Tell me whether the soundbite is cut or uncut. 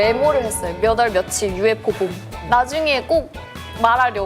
cut